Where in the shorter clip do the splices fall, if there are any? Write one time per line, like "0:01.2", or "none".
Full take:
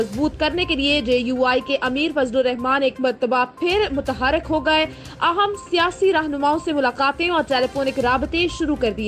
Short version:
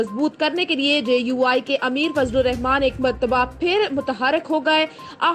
none